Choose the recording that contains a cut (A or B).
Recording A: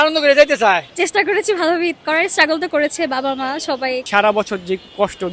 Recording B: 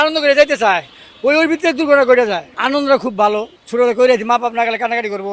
A